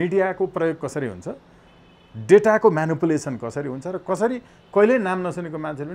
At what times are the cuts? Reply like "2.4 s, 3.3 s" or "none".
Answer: none